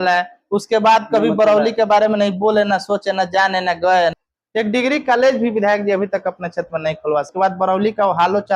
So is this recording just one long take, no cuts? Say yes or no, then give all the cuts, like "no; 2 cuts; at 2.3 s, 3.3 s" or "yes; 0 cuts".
no; 2 cuts; at 4.1 s, 7.3 s